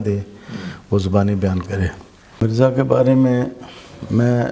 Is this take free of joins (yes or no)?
no